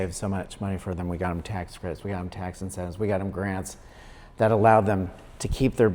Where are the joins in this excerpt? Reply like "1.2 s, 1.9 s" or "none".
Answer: none